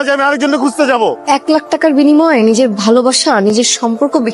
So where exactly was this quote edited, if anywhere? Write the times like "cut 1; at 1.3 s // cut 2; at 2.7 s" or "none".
cut 1; at 1.2 s

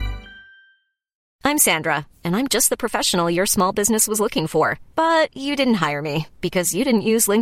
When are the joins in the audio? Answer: cut 1; at 1.3 s

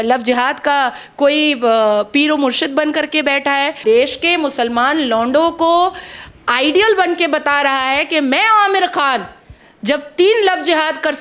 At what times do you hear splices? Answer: cut 1; at 3.8 s

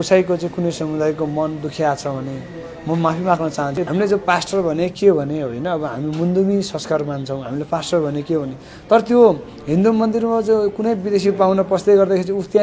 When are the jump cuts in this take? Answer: cut 1; at 3.8 s

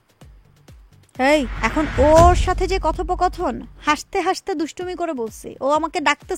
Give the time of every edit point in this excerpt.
cut 1; at 1.5 s

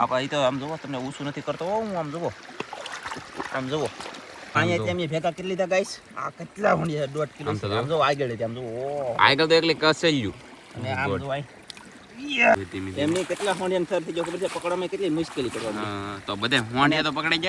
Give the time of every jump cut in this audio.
cut 1; at 4.6 s // cut 2; at 12.5 s

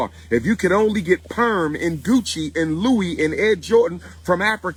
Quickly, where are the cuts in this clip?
none

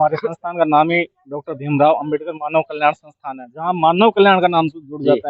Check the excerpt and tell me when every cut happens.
none

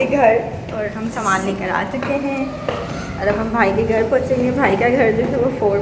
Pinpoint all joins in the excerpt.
none

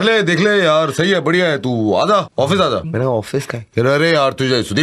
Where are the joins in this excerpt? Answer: cut 1; at 2.4 s

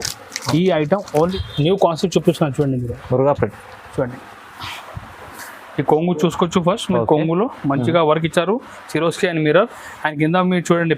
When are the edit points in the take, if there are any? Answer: cut 1; at 1.3 s

